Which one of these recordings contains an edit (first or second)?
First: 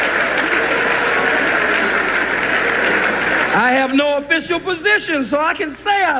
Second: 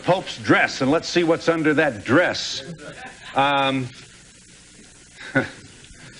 first